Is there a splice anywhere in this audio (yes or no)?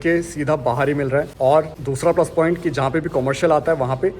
yes